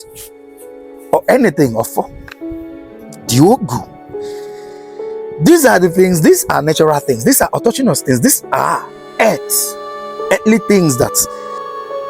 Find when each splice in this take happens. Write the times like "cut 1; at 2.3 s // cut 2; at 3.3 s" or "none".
cut 1; at 11.2 s